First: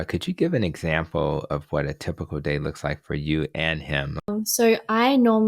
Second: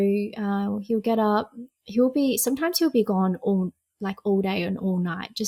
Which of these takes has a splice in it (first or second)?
first